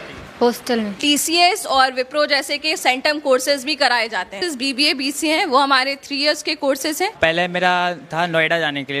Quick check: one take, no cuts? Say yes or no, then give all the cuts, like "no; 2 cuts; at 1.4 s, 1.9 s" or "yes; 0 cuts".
no; 3 cuts; at 0.9 s, 4.4 s, 7.2 s